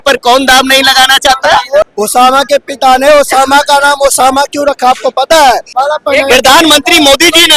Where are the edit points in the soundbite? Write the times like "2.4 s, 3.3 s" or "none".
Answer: 1.9 s, 5.7 s

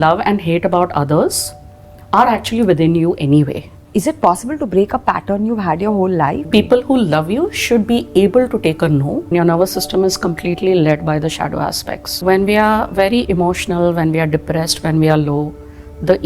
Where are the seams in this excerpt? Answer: 3.8 s, 6.4 s, 9.3 s, 12.2 s

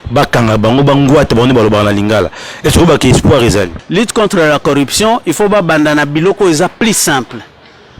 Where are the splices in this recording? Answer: 3.8 s

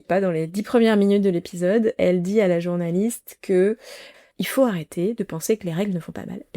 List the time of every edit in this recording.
4.1 s

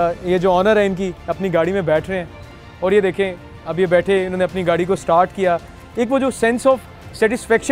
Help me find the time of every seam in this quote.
none

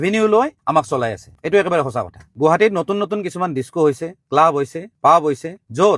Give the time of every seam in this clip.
2.2 s

